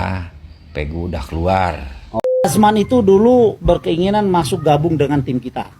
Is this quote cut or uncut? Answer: cut